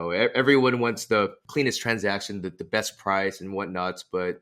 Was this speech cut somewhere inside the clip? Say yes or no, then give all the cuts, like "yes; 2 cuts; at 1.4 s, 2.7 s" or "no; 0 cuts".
yes; 1 cut; at 1.4 s